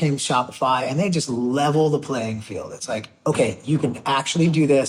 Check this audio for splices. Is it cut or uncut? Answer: uncut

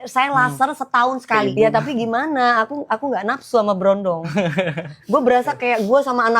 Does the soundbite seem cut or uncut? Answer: cut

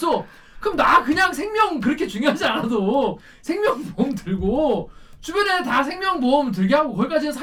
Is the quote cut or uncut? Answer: uncut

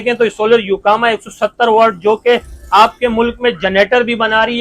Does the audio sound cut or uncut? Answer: uncut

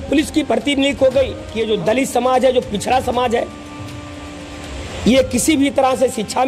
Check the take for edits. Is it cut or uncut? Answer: cut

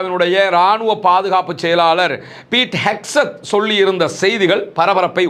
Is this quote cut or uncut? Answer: uncut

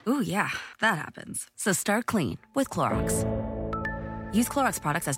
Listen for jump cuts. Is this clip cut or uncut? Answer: cut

